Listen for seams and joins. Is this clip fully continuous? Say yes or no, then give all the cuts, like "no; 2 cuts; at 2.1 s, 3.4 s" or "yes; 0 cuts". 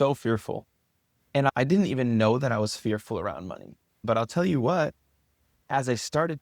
no; 2 cuts; at 1.5 s, 4.0 s